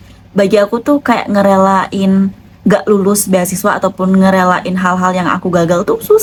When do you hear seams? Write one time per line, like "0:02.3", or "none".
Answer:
none